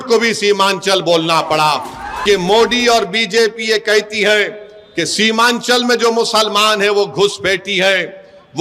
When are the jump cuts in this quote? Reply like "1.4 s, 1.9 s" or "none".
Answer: 2.2 s